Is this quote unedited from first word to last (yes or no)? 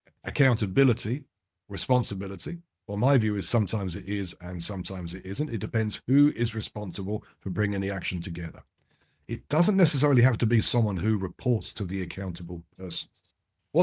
yes